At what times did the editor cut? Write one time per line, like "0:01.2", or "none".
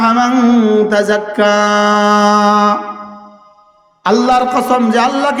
none